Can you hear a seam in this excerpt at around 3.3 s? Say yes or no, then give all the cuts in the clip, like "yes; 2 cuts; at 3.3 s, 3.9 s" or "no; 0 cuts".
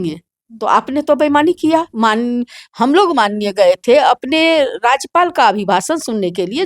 no; 1 cut; at 1.9 s